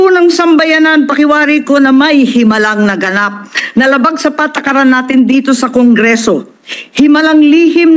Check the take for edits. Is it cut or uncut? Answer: uncut